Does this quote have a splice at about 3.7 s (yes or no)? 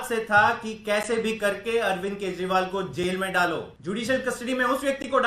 yes